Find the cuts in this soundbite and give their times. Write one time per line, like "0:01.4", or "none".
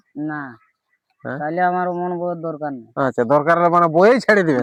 none